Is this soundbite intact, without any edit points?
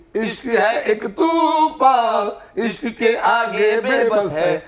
yes; 0 cuts

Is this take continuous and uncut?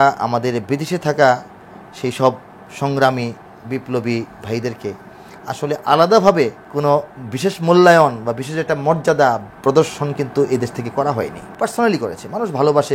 no; 2 cuts; at 6.6 s, 11.4 s

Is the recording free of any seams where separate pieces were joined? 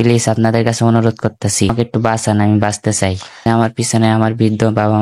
no; 2 cuts; at 1.7 s, 3.3 s

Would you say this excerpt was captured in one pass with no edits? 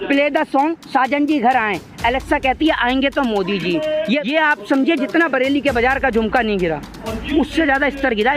no; 1 cut; at 4.3 s

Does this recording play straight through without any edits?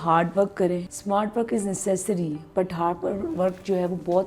no; 1 cut; at 0.9 s

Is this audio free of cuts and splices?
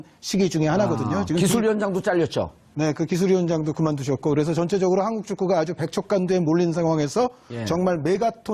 yes; 0 cuts

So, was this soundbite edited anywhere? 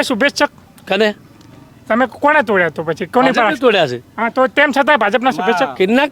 no; 0 cuts

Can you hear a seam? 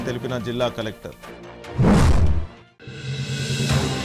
no; 0 cuts

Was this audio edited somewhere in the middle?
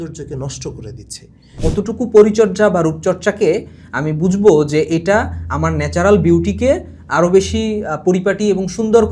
yes; 1 cut; at 1.6 s

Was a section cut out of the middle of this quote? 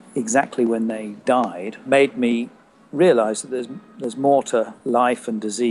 yes; 2 cuts; at 1.8 s, 4.8 s

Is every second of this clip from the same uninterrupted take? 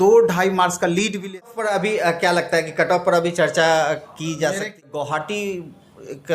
no; 2 cuts; at 1.5 s, 4.7 s

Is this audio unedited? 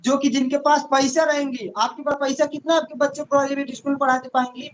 yes; 0 cuts

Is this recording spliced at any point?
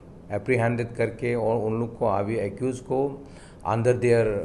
no; 0 cuts

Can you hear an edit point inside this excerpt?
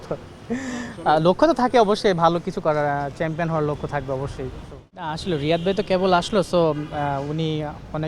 yes; 1 cut; at 5.1 s

